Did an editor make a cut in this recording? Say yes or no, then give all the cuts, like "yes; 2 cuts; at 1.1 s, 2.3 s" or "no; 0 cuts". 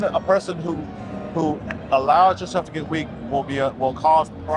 no; 0 cuts